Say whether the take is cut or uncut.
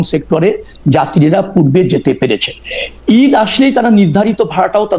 uncut